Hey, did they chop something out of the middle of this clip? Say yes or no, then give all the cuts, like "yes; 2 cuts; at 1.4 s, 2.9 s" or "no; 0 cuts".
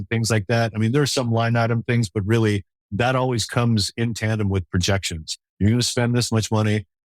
yes; 1 cut; at 2.8 s